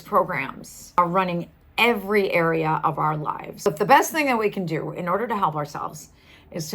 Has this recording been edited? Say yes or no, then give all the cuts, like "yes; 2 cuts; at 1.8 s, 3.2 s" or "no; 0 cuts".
yes; 2 cuts; at 1.0 s, 3.7 s